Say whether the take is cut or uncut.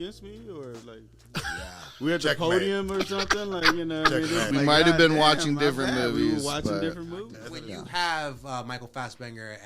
cut